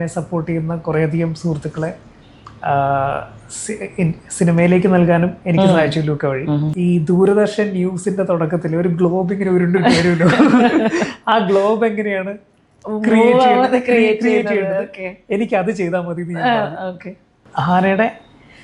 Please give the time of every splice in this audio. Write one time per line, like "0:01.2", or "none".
0:06.7
0:17.4